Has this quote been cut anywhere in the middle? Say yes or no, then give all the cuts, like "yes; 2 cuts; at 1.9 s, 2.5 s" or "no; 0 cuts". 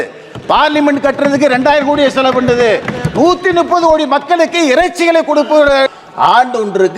yes; 1 cut; at 5.9 s